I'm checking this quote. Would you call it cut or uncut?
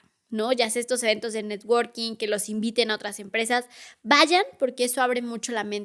uncut